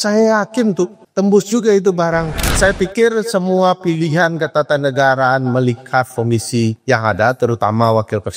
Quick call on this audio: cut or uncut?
cut